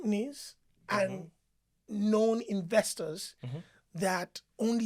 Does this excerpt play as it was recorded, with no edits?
yes; 0 cuts

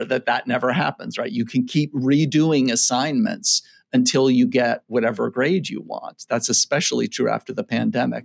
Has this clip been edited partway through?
no; 0 cuts

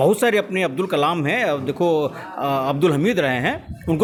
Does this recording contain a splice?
no; 0 cuts

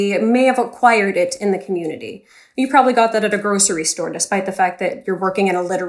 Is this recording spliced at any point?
no; 0 cuts

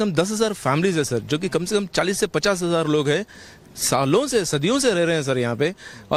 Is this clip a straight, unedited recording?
yes; 0 cuts

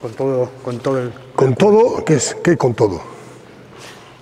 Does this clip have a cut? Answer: no; 0 cuts

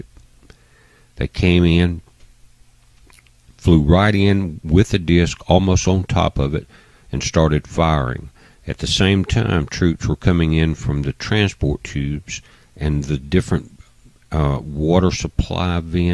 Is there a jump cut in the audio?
yes; 1 cut; at 10.0 s

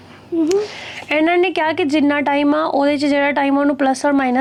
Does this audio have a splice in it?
no; 0 cuts

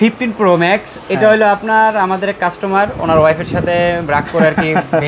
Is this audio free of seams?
yes; 0 cuts

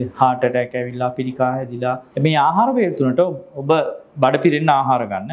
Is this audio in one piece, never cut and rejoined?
no; 1 cut; at 2.1 s

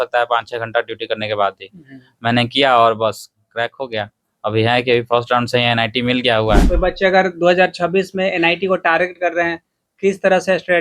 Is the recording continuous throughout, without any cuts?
no; 1 cut; at 6.6 s

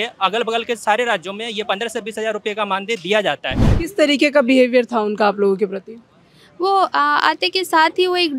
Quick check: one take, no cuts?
no; 1 cut; at 3.7 s

